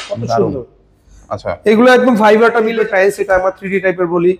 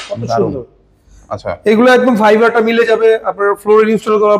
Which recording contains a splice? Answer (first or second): first